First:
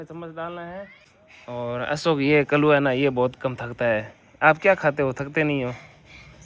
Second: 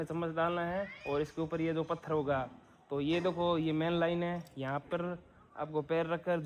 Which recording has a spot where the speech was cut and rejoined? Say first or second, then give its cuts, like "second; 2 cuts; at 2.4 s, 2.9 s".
first; 1 cut; at 0.9 s